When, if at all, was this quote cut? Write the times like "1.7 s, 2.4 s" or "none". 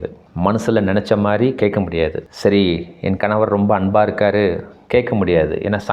none